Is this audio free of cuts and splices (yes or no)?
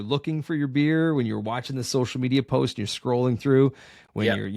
yes